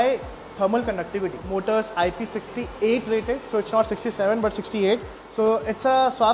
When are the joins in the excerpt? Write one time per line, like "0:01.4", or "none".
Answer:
0:01.5
0:05.2